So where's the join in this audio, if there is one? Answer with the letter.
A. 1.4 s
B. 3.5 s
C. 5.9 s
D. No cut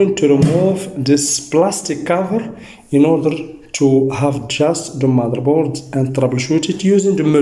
D